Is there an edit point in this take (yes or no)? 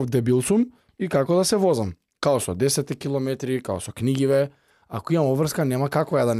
no